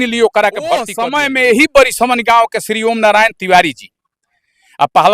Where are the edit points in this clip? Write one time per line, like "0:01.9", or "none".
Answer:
0:01.0